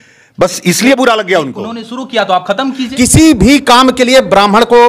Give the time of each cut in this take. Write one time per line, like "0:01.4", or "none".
0:02.8